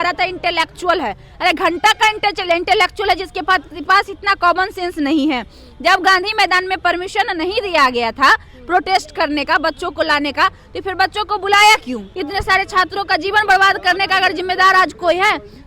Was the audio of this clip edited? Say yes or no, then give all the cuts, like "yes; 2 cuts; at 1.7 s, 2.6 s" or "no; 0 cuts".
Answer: yes; 1 cut; at 12.1 s